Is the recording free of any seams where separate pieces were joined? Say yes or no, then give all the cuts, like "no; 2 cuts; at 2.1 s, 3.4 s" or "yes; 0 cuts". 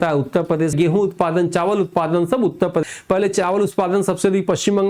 no; 2 cuts; at 0.7 s, 2.8 s